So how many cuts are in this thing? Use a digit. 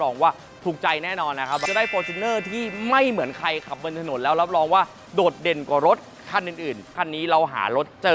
2